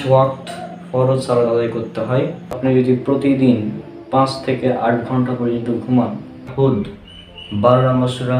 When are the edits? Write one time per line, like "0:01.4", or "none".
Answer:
0:02.6
0:06.5